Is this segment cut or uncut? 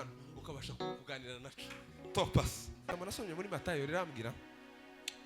cut